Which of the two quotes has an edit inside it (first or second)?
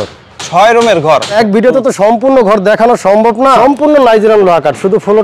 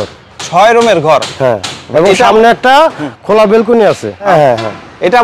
first